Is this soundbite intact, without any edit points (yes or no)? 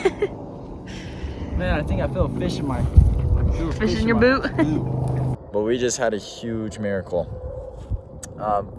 no